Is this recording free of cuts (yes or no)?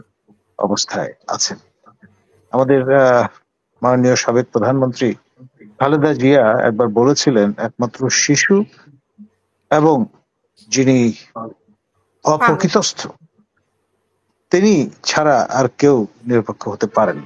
yes